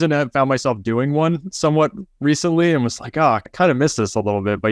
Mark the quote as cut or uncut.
cut